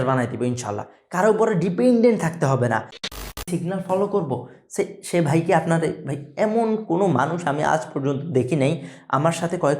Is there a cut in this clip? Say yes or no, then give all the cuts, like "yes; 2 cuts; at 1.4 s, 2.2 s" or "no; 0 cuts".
yes; 1 cut; at 3.0 s